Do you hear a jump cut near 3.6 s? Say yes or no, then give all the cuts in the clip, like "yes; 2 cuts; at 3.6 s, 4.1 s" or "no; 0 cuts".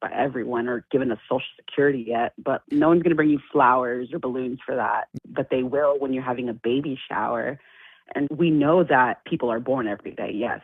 no; 2 cuts; at 8.3 s, 9.2 s